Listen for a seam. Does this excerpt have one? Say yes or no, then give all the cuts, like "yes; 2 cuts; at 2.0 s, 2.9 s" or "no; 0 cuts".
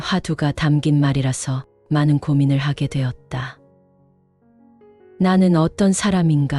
yes; 2 cuts; at 3.6 s, 5.1 s